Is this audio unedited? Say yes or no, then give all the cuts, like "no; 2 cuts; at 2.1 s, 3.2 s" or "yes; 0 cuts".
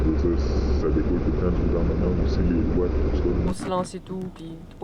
no; 1 cut; at 3.5 s